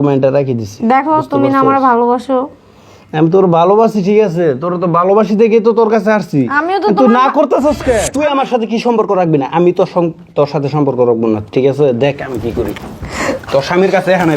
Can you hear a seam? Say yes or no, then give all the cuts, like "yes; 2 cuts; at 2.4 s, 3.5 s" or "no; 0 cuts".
yes; 1 cut; at 8.1 s